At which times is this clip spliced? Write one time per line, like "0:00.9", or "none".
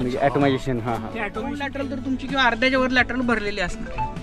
0:01.6